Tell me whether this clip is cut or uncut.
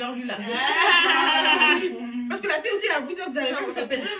uncut